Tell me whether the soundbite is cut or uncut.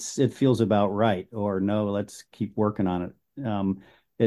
uncut